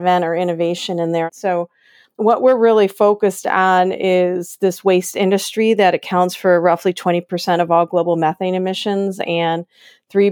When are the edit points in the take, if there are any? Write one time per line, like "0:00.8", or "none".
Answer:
0:01.3

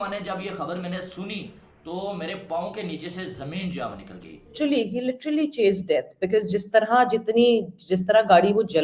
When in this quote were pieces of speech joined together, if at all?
0:04.5

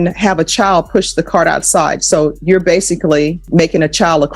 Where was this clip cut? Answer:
0:03.5

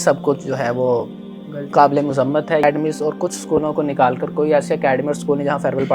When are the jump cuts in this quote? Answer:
0:02.6

